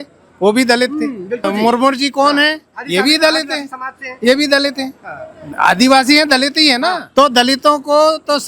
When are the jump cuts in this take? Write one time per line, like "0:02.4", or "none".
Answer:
0:01.4
0:07.0